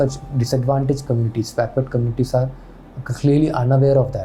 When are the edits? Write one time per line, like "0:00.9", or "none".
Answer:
none